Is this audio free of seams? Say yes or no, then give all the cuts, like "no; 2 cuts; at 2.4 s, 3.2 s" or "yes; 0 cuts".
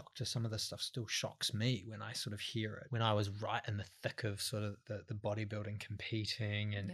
no; 1 cut; at 2.8 s